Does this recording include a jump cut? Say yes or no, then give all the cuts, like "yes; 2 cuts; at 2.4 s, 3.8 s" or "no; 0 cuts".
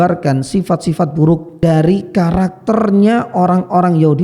yes; 1 cut; at 1.5 s